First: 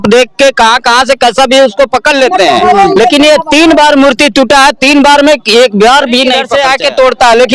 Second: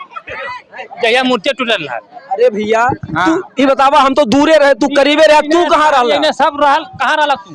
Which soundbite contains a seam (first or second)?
first